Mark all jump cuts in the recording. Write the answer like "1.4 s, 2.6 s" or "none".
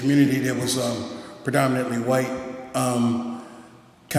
1.4 s